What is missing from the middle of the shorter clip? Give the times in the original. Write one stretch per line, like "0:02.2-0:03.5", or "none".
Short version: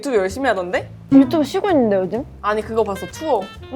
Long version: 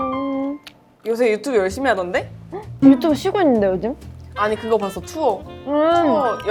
0:02.3-0:02.6
0:04.0-0:04.3